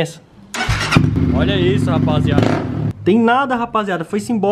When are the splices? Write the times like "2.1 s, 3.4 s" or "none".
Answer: 1.2 s, 2.9 s